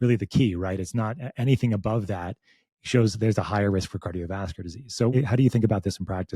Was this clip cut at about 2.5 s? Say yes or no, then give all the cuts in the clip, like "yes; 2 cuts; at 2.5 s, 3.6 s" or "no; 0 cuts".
no; 1 cut; at 5.2 s